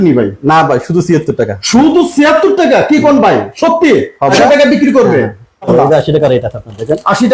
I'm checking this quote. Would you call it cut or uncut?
cut